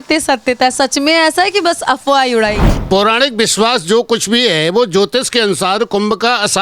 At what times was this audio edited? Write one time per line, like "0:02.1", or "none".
0:02.7